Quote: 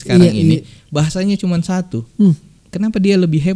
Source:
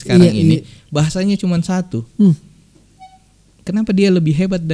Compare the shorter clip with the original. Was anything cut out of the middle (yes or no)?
yes